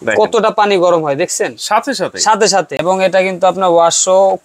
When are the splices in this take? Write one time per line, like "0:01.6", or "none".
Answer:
0:02.7